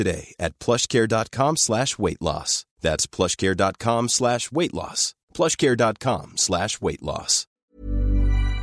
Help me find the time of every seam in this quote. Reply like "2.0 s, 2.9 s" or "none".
7.7 s